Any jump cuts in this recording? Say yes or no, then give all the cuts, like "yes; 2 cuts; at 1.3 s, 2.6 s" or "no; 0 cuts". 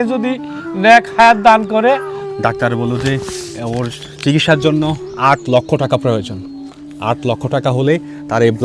yes; 1 cut; at 2.2 s